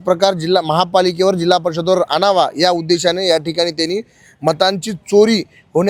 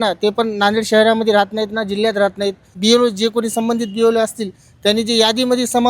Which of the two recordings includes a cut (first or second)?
second